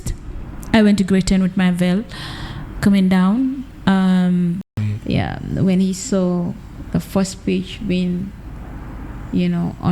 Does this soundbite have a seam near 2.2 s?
no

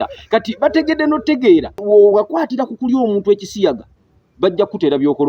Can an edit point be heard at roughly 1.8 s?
yes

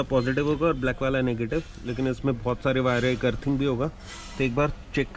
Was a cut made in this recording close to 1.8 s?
no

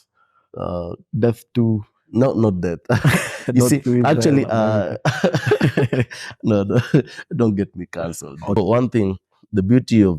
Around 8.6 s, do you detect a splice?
yes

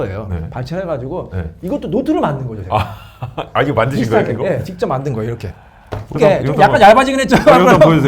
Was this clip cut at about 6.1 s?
yes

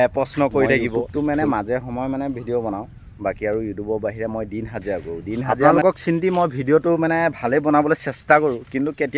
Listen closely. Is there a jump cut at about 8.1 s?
no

